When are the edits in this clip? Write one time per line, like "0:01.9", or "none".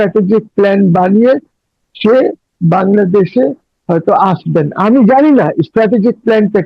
none